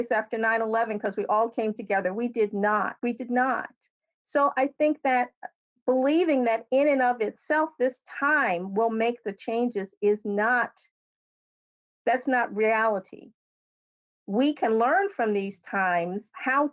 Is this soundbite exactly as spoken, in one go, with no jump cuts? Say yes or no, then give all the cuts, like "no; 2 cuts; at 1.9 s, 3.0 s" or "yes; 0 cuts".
yes; 0 cuts